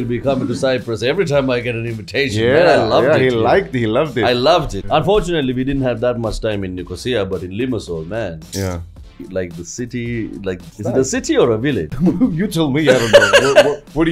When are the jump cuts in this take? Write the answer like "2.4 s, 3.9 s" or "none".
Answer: 4.9 s, 9.2 s, 10.7 s, 11.9 s